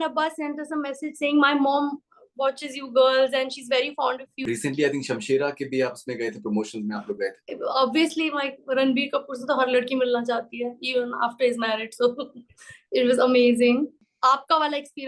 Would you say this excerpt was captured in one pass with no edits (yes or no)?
no